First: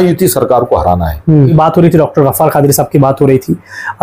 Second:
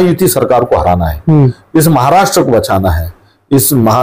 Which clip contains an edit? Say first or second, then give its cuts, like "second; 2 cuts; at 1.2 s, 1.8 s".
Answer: first; 1 cut; at 1.5 s